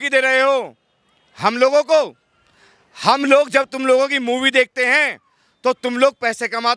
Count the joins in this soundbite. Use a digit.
0